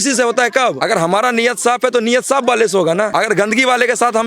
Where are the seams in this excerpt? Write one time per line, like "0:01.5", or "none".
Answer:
0:00.8
0:03.1